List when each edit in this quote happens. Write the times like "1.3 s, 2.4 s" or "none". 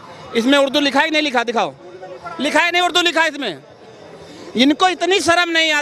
none